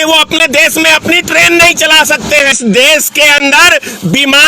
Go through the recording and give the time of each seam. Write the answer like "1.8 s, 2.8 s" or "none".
2.5 s